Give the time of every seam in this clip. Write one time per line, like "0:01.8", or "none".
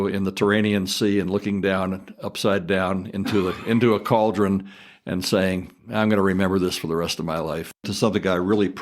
0:07.9